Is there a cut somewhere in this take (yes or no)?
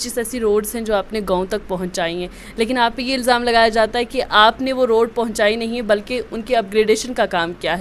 no